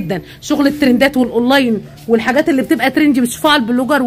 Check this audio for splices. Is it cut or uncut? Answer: uncut